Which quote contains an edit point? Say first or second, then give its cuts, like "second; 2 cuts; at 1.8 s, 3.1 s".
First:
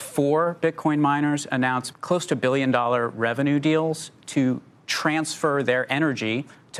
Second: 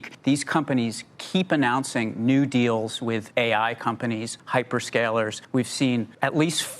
second; 2 cuts; at 3.3 s, 4.3 s